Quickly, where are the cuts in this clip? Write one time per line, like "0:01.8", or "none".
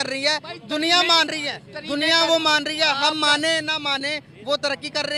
none